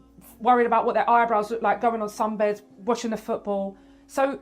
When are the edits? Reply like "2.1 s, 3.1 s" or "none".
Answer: 3.4 s